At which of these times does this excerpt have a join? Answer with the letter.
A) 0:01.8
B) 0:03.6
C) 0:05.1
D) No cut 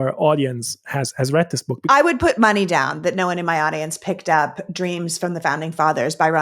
A